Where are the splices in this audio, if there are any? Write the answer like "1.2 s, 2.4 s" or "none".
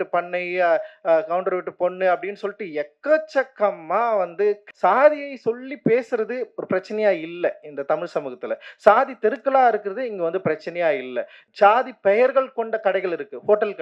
4.6 s, 11.3 s